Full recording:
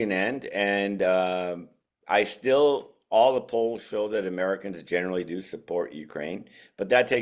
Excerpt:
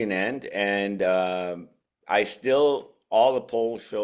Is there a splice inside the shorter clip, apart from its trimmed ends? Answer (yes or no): no